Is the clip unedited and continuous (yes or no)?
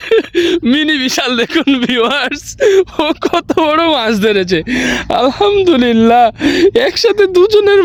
yes